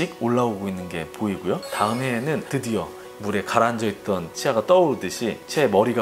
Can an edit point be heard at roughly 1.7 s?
yes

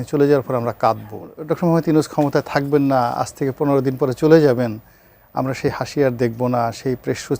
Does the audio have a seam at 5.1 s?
no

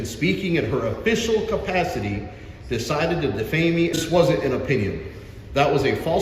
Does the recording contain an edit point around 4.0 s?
yes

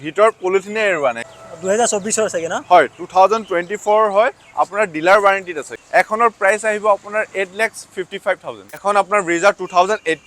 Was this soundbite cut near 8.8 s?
yes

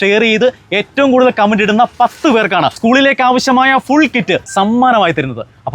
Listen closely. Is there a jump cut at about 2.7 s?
yes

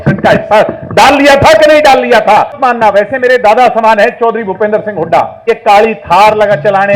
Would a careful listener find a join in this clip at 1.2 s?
no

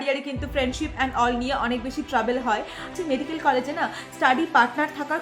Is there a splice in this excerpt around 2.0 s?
no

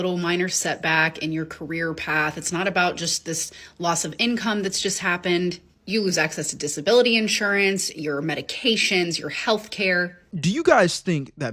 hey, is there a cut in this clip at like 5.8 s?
no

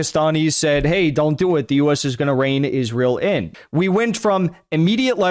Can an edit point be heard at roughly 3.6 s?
yes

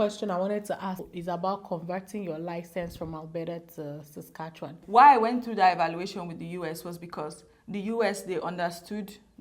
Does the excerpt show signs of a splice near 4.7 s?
yes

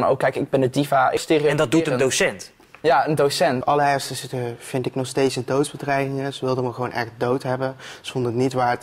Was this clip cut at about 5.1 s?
no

